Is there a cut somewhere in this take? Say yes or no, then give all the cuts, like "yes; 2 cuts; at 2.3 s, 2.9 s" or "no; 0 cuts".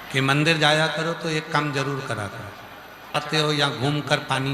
yes; 1 cut; at 3.2 s